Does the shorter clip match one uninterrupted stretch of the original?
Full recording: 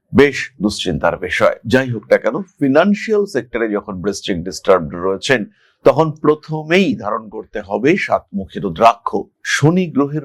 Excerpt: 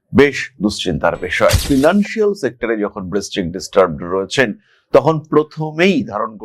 no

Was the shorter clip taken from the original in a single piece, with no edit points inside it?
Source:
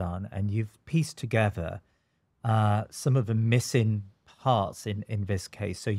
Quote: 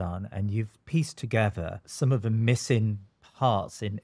no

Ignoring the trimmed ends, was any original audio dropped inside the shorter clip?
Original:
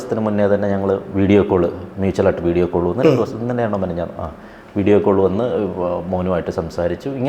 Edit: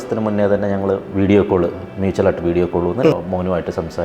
yes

